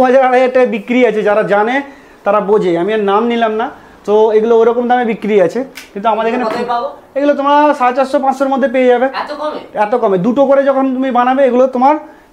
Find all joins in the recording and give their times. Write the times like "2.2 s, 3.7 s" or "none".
none